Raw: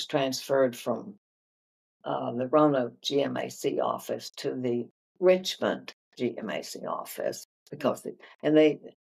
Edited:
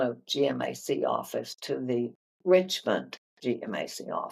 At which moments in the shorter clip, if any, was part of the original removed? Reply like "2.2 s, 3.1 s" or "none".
none